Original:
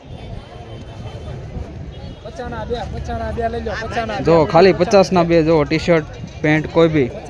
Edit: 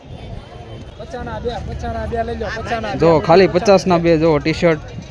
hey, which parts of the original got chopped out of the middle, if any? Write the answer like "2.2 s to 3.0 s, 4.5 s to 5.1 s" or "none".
0.9 s to 2.2 s

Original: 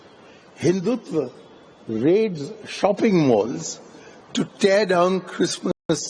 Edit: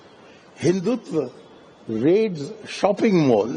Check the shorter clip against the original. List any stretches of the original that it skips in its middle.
none

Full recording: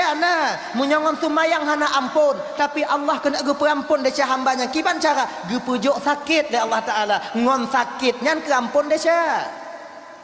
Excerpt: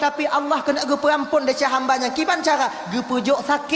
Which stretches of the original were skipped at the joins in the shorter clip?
none

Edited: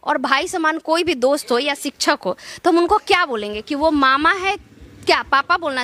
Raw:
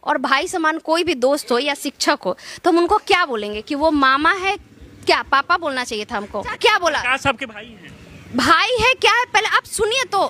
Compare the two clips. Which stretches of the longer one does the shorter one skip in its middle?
none

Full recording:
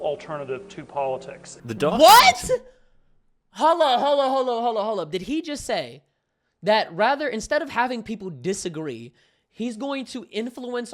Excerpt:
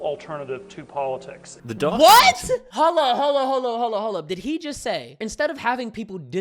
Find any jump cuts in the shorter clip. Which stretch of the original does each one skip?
2.7 s to 3.5 s, 6.1 s to 7.4 s

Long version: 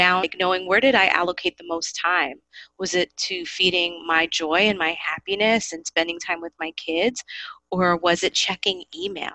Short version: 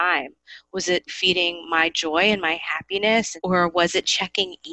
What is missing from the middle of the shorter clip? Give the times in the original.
3.2 s to 3.5 s, 5.7 s to 7.6 s

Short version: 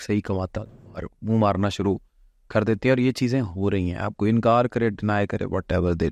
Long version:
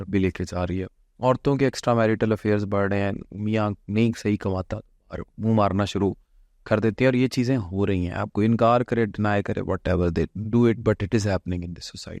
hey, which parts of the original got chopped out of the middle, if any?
none

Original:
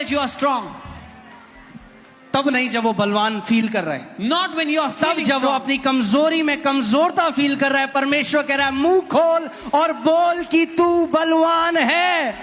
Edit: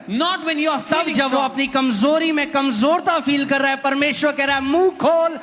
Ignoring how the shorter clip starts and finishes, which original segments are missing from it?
none

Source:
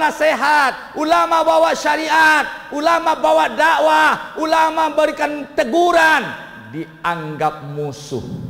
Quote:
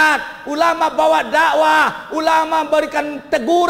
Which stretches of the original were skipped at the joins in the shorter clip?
none

